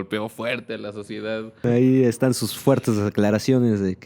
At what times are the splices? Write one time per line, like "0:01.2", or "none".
0:01.6